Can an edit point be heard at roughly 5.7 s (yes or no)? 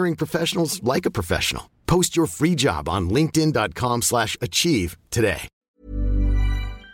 yes